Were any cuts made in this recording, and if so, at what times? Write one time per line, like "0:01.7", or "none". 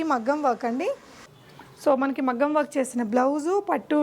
0:01.3